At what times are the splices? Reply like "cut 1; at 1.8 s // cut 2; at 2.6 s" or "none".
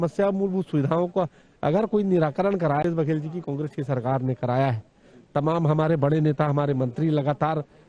cut 1; at 2.8 s